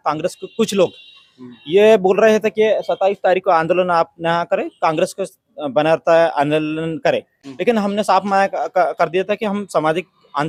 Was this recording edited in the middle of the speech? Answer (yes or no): no